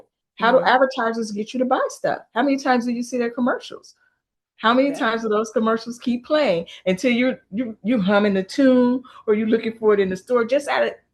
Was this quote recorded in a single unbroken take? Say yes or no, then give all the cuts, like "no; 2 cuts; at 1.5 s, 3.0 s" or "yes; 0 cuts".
yes; 0 cuts